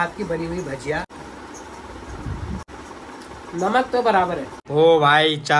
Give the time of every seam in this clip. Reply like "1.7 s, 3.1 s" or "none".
1.1 s, 2.7 s, 4.5 s

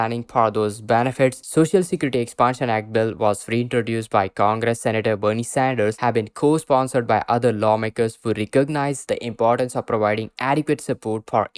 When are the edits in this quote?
1.4 s

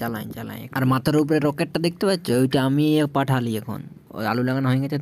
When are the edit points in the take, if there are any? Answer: none

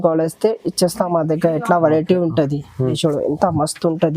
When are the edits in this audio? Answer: 2.9 s

